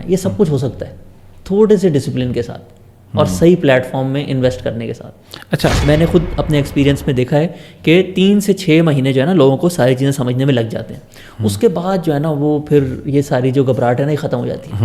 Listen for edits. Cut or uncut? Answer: cut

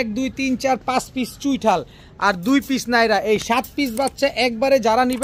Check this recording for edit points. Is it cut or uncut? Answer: uncut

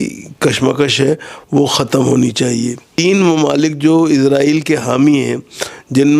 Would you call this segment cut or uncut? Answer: cut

